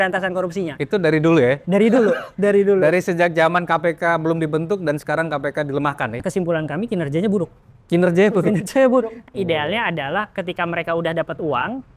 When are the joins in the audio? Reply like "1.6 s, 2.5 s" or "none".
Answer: 6.2 s, 9.2 s